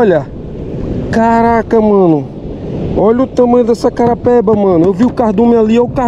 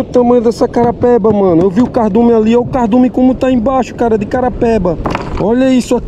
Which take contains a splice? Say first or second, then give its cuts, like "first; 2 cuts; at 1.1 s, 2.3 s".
second; 1 cut; at 5.1 s